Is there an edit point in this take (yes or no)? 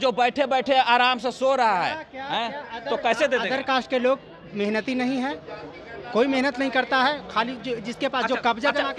no